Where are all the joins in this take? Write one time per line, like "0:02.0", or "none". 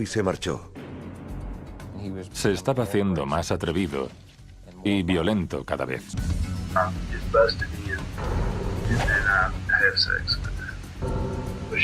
0:10.6